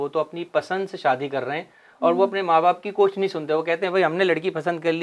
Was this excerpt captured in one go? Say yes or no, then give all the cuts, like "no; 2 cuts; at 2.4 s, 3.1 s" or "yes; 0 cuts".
yes; 0 cuts